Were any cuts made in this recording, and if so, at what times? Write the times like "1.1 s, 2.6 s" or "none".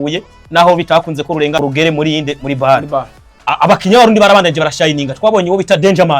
1.6 s, 3.8 s